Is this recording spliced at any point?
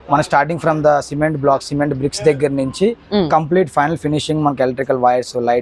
no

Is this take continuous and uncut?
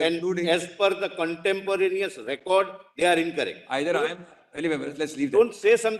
yes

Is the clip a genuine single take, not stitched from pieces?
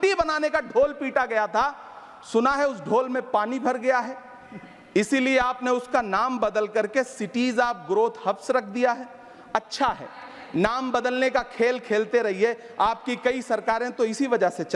yes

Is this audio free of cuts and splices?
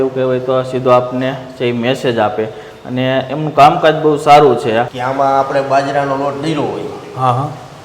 no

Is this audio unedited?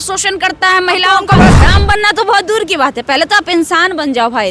no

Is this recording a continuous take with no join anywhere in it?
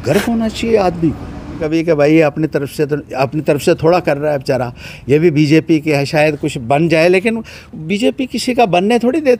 no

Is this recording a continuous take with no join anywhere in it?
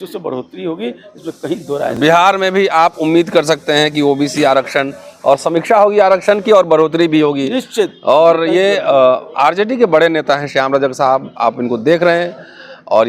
yes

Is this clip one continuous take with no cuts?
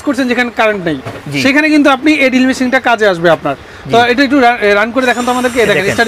yes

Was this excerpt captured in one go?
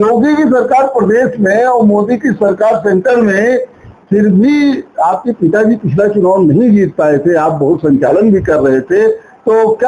yes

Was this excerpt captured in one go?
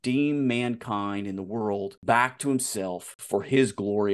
no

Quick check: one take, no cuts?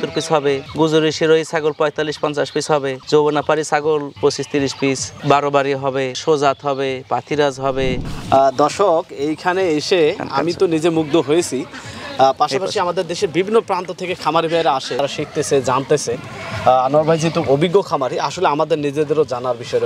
yes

